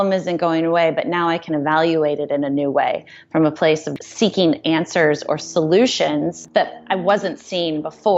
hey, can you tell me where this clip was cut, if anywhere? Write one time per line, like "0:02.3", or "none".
0:03.9
0:06.4